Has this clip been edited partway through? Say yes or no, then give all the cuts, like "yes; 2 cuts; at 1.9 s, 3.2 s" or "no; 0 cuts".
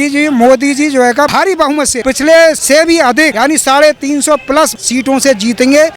yes; 3 cuts; at 1.8 s, 3.0 s, 4.8 s